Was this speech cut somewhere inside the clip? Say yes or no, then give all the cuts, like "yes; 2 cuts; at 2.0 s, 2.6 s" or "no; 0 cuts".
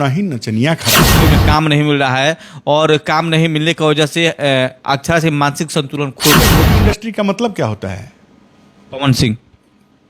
yes; 2 cuts; at 1.3 s, 6.6 s